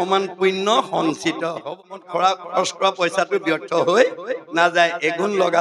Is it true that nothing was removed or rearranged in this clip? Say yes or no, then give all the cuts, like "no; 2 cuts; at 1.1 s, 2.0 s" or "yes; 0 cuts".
no; 1 cut; at 1.7 s